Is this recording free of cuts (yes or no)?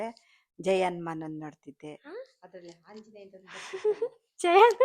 yes